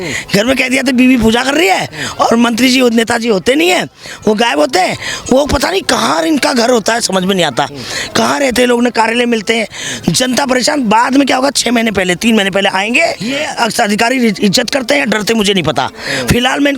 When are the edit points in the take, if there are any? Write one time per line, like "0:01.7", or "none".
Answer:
0:13.4